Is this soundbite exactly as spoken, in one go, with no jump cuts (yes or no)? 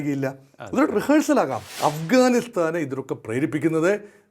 no